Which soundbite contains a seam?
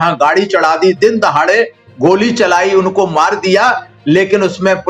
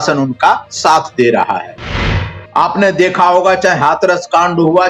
second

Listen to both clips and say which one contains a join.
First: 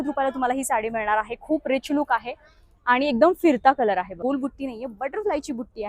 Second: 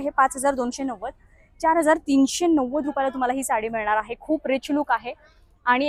first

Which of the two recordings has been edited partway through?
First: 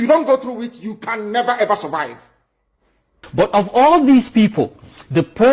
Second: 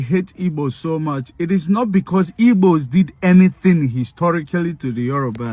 first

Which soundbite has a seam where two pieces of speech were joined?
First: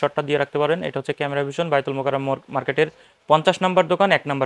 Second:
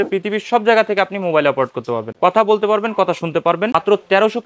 second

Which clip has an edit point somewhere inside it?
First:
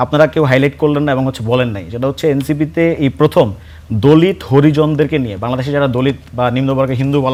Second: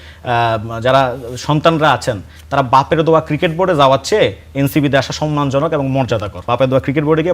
second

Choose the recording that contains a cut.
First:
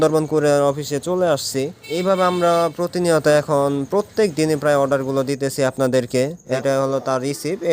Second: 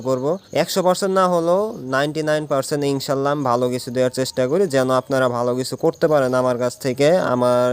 first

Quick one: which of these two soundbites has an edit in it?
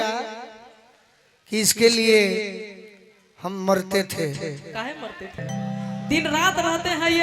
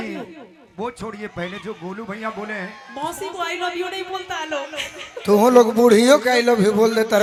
first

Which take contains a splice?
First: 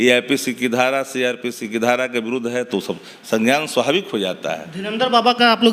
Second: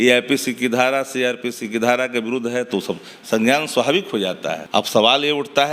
second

